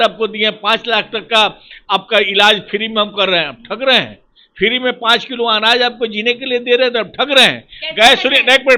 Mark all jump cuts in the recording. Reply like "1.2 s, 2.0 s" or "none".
none

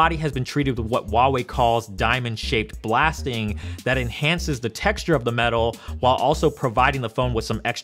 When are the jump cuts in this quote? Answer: 3.6 s

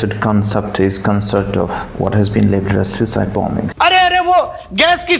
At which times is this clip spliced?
1.8 s, 3.7 s

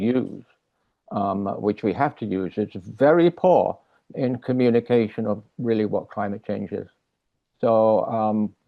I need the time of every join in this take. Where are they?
none

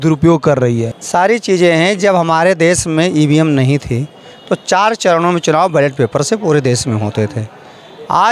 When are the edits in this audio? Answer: 0.9 s

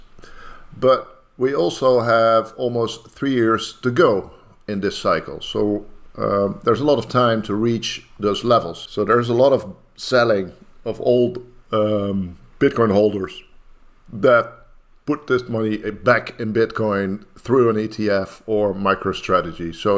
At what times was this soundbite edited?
8.8 s

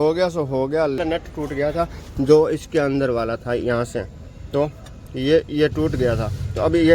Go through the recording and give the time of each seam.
1.0 s

